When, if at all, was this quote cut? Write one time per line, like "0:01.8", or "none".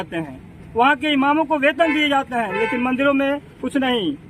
none

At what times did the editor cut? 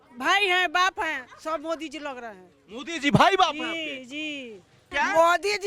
0:04.7

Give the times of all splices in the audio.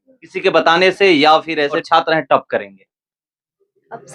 0:01.8

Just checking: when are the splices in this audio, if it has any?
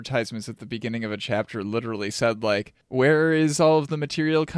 0:02.8

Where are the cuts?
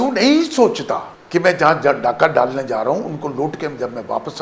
0:01.1

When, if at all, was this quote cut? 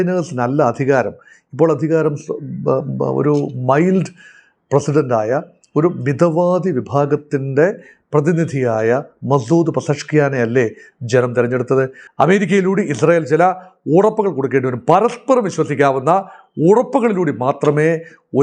0:12.0

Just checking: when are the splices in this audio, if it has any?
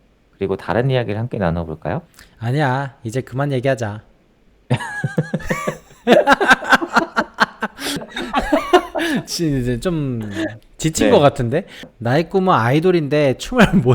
0:08.1
0:11.8

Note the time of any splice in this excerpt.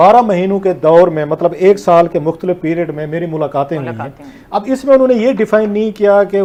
none

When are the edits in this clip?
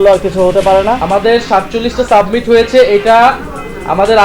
0:01.0

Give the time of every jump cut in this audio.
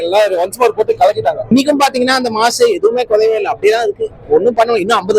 0:01.5

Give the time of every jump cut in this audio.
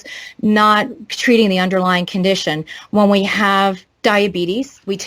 0:03.9

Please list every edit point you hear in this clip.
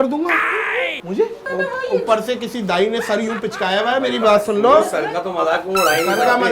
0:01.4

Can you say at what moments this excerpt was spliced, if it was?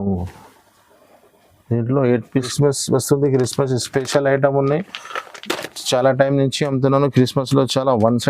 0:02.5

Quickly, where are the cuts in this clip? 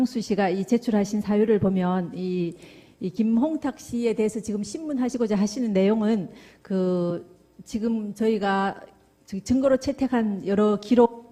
0:01.5

